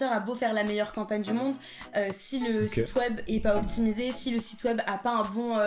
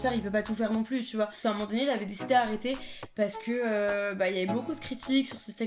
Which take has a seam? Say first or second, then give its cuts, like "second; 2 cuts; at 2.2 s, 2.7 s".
second; 1 cut; at 1.4 s